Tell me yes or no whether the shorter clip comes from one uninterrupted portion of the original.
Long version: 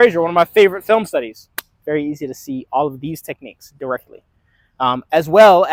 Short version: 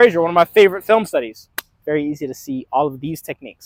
yes